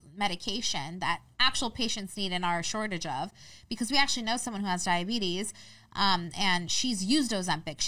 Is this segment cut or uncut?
uncut